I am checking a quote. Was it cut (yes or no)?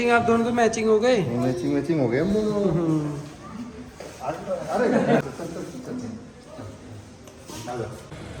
no